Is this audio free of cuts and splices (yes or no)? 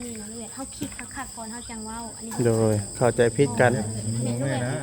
no